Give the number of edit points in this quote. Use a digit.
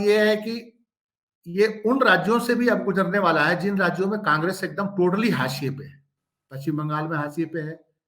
0